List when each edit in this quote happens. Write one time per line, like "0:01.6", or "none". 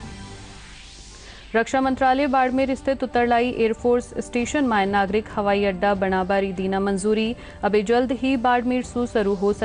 none